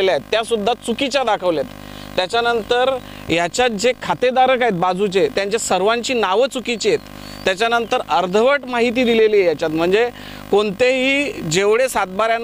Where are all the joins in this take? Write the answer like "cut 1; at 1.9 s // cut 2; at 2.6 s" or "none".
none

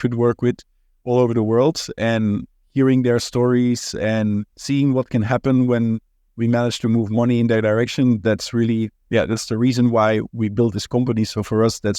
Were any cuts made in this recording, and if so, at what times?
cut 1; at 2.5 s // cut 2; at 4.5 s

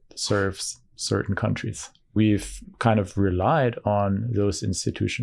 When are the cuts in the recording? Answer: cut 1; at 2.1 s

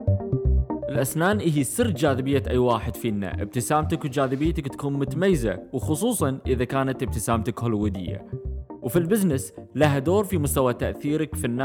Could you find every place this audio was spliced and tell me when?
cut 1; at 0.9 s

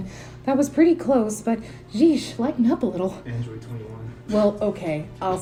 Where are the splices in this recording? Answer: none

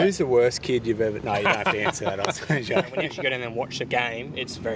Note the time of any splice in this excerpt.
cut 1; at 3.1 s

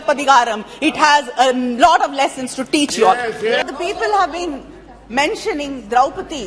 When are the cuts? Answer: cut 1; at 3.6 s

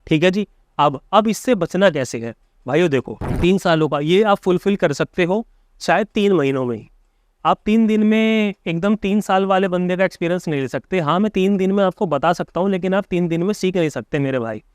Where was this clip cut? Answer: cut 1; at 3.2 s

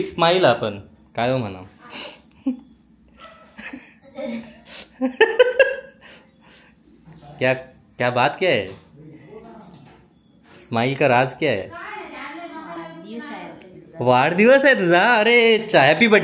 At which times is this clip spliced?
none

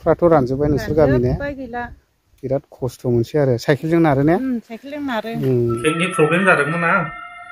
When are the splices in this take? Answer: cut 1; at 5.8 s

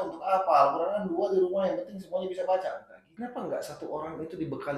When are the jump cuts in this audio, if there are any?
cut 1; at 3.0 s

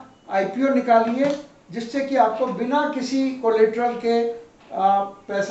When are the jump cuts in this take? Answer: none

